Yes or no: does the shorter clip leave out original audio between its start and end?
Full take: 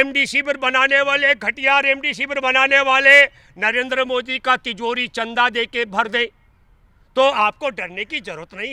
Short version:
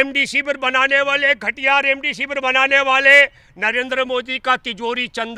no